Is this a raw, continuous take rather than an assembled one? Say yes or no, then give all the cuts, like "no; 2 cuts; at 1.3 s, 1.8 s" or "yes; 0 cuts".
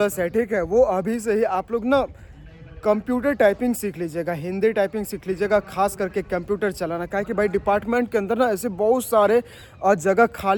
yes; 0 cuts